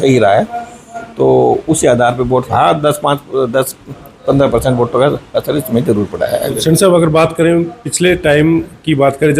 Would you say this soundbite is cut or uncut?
cut